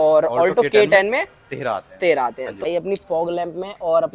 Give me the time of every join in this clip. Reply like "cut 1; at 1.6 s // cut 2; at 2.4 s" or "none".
cut 1; at 2.6 s